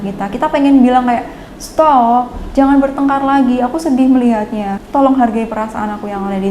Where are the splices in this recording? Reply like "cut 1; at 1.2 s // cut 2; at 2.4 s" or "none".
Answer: cut 1; at 4.8 s